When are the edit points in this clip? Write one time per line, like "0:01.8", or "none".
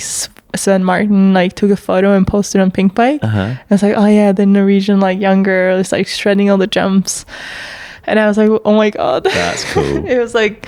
none